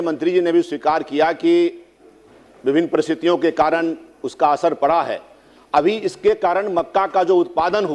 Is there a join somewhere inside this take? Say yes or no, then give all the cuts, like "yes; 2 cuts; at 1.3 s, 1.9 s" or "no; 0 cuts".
no; 0 cuts